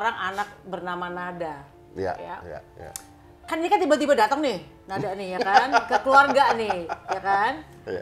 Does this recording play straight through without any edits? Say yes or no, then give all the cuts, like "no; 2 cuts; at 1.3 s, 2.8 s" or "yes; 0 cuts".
yes; 0 cuts